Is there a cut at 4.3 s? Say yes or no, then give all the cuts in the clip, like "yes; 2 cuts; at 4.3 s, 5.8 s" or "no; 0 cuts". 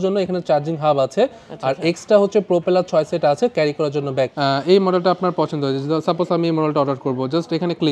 yes; 1 cut; at 4.3 s